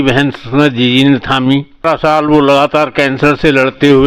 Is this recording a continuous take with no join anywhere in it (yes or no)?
no